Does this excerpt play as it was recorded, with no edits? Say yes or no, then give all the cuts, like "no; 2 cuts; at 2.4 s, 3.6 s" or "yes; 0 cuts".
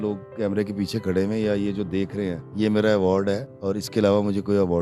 no; 2 cuts; at 2.4 s, 3.5 s